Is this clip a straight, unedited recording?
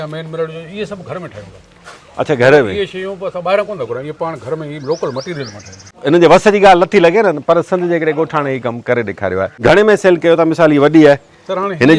no; 2 cuts; at 5.8 s, 9.5 s

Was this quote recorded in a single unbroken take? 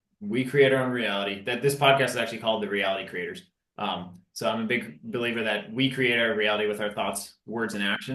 yes; 0 cuts

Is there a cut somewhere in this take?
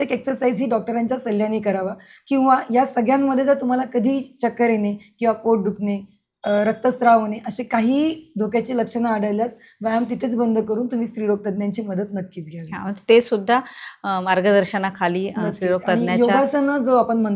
no; 0 cuts

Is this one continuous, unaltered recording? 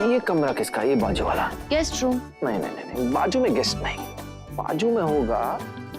no; 1 cut; at 1.6 s

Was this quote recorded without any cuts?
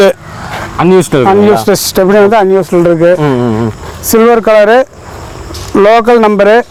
yes; 0 cuts

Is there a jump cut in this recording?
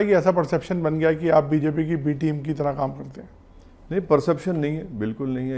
no; 0 cuts

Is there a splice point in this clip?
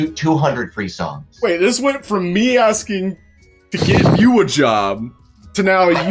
no; 0 cuts

